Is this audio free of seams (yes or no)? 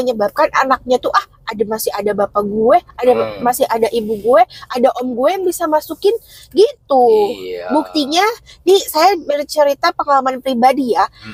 yes